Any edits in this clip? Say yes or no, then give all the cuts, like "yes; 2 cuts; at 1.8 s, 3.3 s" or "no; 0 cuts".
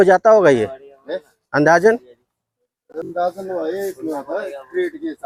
no; 0 cuts